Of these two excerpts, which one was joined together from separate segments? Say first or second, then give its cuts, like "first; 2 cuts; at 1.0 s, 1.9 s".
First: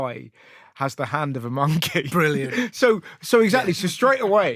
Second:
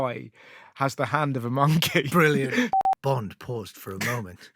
second; 1 cut; at 2.7 s